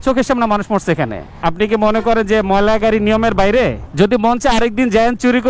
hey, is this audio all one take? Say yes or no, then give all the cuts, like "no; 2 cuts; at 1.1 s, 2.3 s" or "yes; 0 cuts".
no; 2 cuts; at 1.4 s, 3.8 s